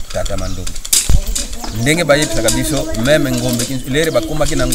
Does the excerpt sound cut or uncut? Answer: cut